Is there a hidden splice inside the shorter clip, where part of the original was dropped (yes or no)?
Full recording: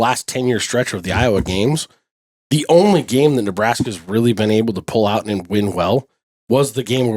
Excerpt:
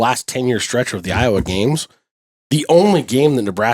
no